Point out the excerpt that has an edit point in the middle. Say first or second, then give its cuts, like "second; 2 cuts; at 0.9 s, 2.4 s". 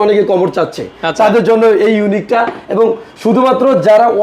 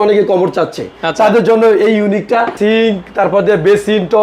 second; 1 cut; at 2.6 s